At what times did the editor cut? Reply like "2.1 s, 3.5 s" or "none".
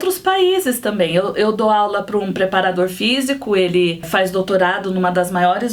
4.1 s